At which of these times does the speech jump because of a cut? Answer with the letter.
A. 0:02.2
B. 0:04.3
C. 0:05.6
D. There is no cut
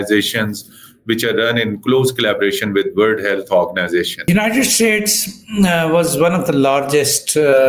B